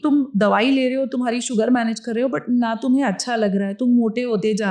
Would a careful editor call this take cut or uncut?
uncut